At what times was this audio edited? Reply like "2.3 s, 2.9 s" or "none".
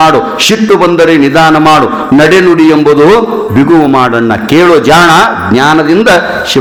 none